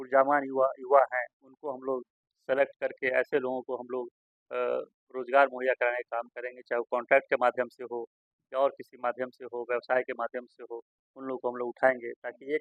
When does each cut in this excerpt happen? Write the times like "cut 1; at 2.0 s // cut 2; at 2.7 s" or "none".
none